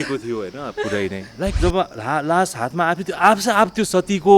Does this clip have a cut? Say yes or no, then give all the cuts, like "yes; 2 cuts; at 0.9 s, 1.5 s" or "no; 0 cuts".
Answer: yes; 1 cut; at 1.6 s